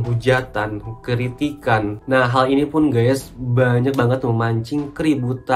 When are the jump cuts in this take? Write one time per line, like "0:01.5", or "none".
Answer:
0:02.0